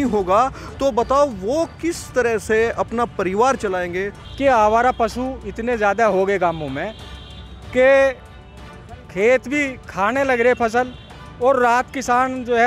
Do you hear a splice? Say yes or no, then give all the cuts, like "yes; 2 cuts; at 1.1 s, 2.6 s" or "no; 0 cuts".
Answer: yes; 1 cut; at 4.2 s